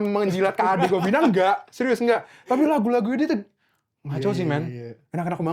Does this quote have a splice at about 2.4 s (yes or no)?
no